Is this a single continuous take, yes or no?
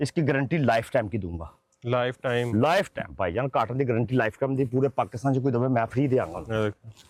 yes